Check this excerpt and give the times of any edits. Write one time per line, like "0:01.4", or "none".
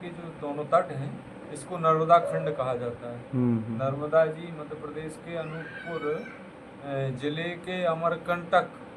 none